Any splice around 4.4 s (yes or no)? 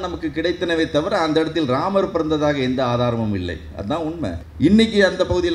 yes